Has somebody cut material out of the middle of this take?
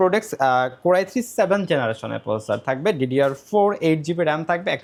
no; 0 cuts

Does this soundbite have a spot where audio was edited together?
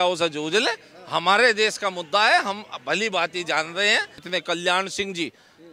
yes; 1 cut; at 4.2 s

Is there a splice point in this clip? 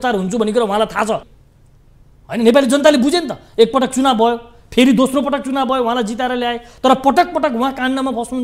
yes; 1 cut; at 1.4 s

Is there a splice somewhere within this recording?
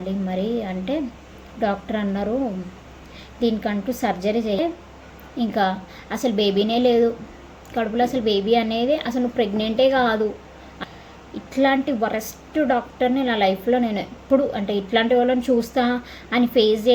yes; 2 cuts; at 4.6 s, 10.8 s

